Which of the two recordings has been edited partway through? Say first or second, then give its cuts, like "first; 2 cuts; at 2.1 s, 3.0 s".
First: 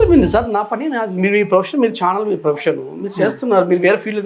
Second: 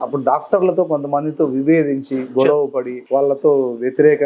second; 1 cut; at 3.0 s